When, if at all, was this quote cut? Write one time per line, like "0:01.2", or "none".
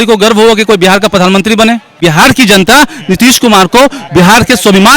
0:02.0